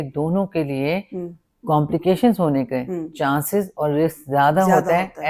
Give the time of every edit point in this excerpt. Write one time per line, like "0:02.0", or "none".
none